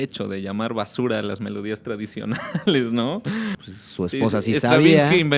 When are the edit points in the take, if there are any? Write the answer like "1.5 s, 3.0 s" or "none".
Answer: 3.6 s